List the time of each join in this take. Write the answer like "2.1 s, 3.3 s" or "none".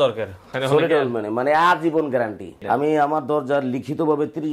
2.6 s